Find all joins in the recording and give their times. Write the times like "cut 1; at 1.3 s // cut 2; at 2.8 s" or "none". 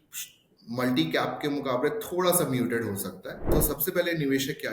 cut 1; at 3.4 s